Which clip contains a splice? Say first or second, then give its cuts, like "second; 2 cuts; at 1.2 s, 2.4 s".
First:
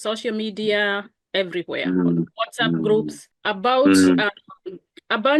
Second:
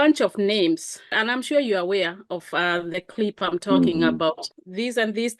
second; 2 cuts; at 1.1 s, 4.4 s